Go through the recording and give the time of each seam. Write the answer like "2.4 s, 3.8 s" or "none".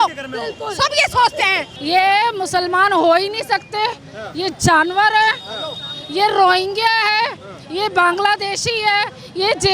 1.7 s